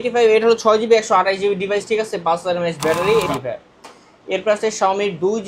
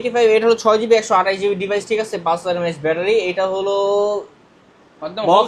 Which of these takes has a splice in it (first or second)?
first